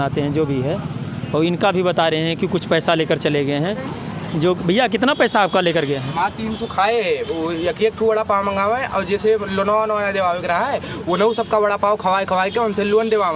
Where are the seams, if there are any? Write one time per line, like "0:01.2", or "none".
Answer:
none